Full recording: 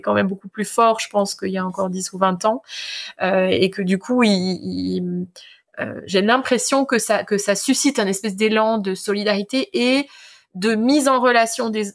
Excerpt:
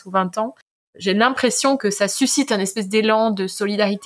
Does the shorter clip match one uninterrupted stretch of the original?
no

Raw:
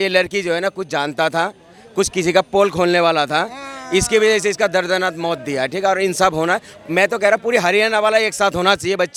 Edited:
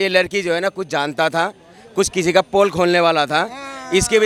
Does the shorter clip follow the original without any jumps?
yes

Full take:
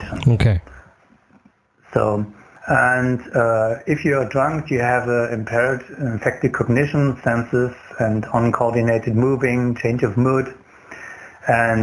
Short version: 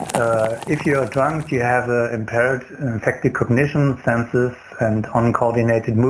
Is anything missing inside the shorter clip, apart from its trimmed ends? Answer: no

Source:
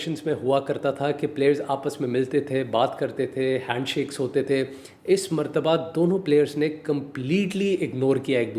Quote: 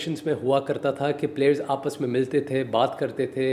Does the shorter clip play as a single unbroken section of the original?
yes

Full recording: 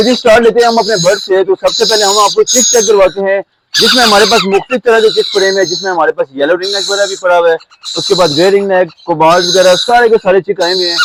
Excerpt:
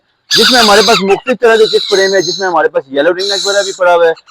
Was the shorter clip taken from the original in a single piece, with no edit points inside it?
yes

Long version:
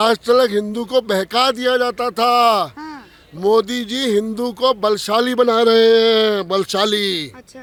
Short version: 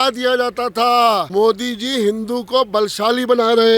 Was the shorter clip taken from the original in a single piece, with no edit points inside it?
no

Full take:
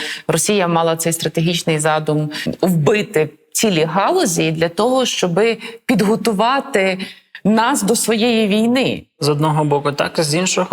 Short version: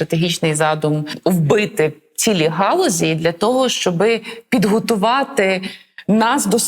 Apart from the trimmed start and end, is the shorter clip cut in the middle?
yes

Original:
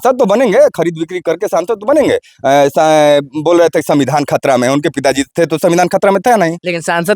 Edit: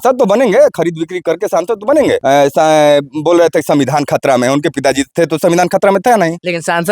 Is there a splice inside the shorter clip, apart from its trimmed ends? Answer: yes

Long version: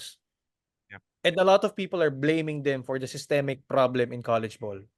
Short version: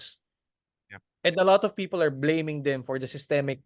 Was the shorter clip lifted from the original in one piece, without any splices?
yes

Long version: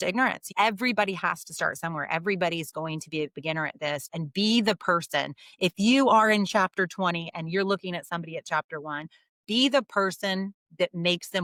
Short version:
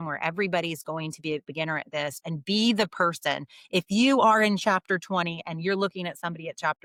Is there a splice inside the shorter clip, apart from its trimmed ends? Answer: no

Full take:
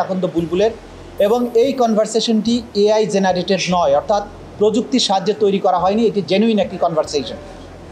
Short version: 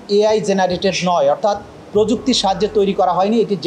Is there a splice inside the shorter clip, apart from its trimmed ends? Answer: no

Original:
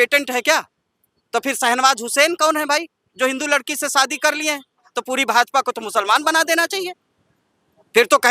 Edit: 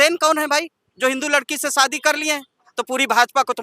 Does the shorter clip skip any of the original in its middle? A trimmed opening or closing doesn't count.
no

